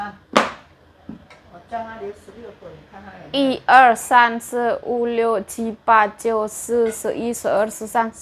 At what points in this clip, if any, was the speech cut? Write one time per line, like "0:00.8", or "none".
none